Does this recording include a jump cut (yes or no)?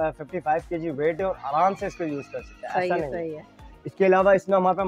no